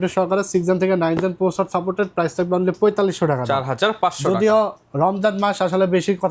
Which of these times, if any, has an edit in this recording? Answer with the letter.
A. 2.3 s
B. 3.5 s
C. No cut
C